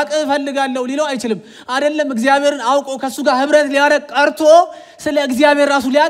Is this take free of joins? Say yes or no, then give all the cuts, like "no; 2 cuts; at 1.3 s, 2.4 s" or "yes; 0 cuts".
yes; 0 cuts